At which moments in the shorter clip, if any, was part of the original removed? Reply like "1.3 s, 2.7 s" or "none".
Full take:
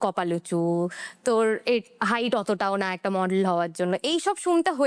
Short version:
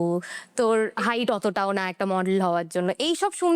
0.9 s